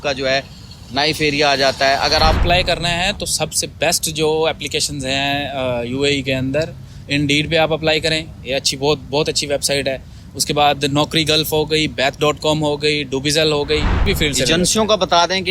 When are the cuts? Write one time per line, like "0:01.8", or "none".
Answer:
0:02.4
0:14.0